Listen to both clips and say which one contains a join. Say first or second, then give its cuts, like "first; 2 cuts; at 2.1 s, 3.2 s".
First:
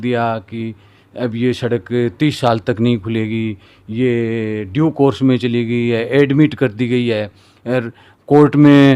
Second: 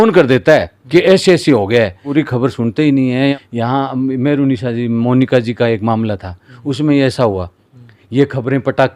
second; 2 cuts; at 2.0 s, 3.3 s